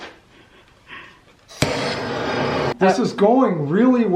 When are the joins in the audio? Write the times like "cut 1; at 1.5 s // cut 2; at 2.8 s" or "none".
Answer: cut 1; at 2.7 s